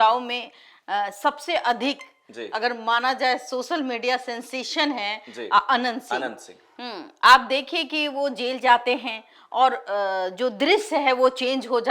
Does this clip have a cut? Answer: no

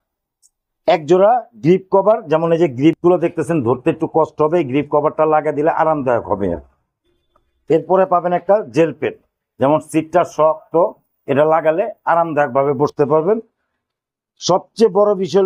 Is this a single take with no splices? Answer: yes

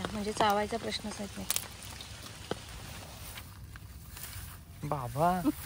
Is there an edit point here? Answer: yes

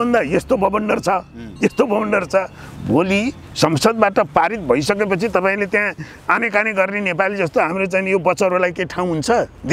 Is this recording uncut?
yes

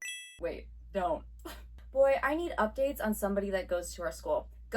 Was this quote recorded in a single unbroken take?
no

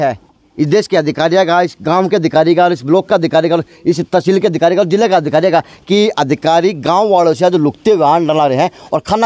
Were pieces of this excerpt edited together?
no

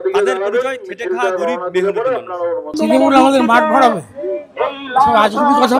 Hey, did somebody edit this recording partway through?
yes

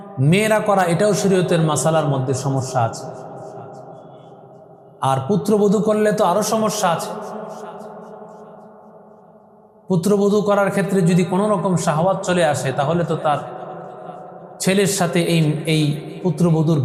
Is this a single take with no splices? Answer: yes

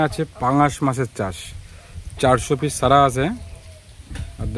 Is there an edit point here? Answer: no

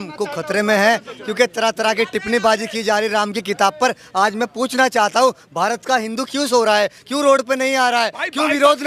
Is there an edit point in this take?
no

